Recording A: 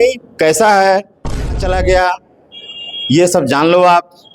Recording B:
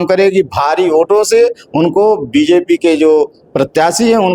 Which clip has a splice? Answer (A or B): A